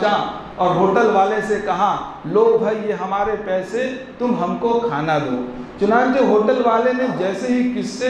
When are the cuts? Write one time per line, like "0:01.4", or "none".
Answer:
none